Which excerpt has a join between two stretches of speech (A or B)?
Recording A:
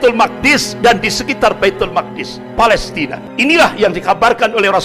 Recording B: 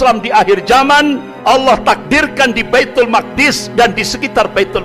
A